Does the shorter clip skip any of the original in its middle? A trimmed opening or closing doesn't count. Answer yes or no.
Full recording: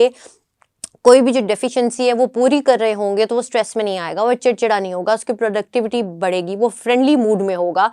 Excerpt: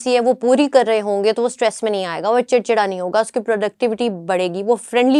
no